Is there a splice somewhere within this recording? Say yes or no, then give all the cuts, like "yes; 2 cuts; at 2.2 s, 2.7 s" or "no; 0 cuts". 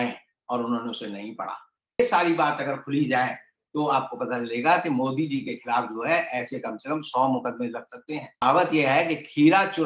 yes; 2 cuts; at 2.0 s, 8.4 s